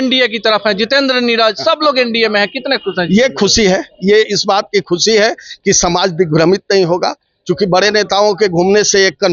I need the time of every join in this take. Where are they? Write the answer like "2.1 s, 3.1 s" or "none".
none